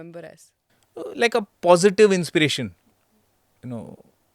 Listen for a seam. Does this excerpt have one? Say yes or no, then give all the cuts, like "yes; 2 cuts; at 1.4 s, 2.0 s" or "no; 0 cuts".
no; 0 cuts